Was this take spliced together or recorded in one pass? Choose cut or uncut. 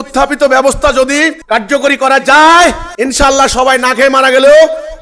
cut